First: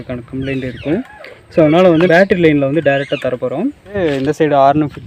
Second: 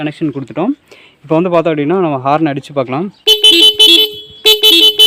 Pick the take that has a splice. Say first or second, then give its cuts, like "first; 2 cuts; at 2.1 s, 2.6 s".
first; 2 cuts; at 2.1 s, 4.0 s